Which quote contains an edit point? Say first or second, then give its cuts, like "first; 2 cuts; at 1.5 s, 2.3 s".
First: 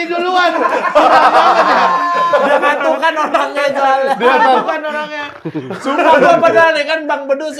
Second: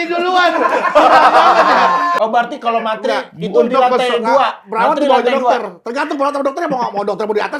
second; 1 cut; at 2.2 s